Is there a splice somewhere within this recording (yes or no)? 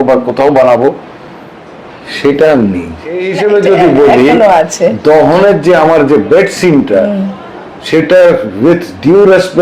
yes